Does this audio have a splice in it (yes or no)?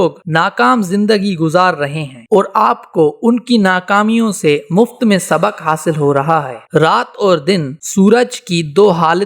no